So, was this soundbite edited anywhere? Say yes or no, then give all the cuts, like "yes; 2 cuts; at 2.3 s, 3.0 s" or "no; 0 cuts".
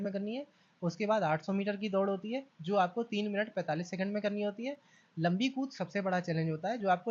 no; 0 cuts